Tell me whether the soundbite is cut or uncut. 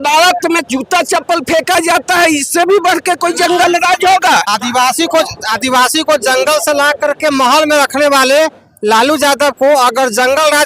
cut